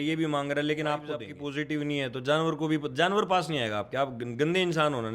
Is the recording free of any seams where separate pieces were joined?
no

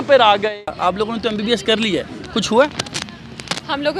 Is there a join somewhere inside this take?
yes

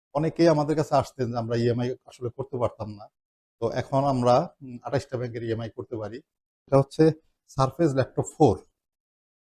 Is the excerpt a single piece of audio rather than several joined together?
no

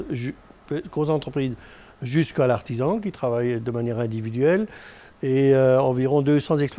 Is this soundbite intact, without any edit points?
yes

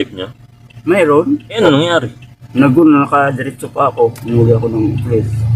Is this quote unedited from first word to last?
yes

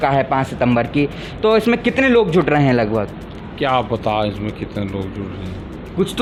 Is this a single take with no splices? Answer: yes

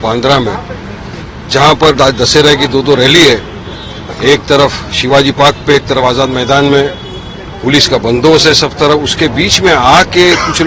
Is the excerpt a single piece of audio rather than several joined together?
yes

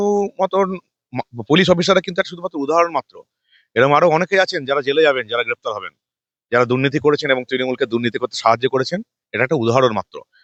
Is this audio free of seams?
yes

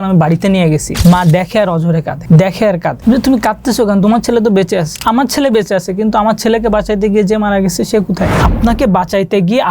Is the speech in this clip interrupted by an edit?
yes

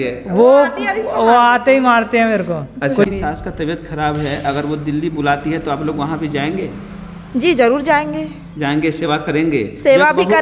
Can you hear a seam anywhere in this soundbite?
yes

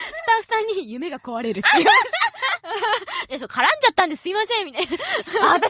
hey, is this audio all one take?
no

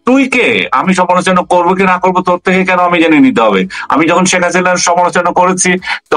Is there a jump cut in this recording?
no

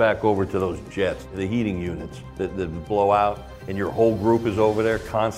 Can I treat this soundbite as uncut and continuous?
no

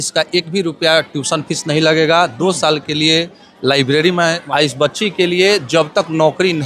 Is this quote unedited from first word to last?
no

